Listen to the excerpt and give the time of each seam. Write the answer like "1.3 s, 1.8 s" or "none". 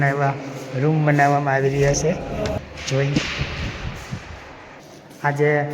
2.6 s, 4.8 s